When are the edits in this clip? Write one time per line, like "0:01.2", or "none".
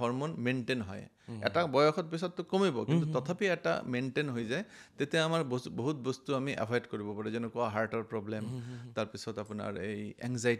none